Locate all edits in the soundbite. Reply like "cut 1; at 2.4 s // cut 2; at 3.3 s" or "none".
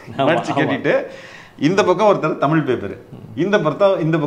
none